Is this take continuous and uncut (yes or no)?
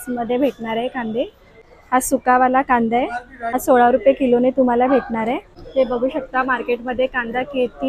no